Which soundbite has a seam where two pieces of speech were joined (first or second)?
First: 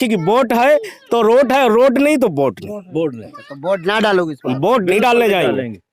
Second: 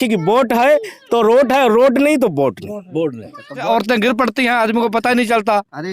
second